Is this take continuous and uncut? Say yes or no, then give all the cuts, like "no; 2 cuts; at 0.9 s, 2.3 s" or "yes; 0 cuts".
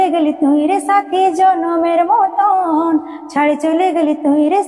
yes; 0 cuts